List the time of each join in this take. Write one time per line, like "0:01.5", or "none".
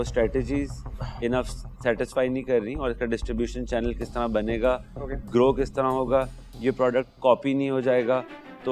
none